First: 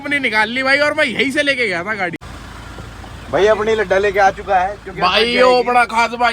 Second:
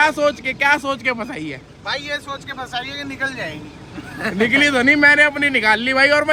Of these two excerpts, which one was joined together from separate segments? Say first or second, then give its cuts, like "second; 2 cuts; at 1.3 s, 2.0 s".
first; 1 cut; at 2.2 s